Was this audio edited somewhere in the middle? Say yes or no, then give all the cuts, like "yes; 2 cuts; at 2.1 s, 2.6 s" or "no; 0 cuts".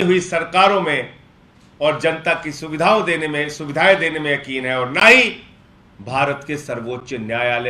no; 0 cuts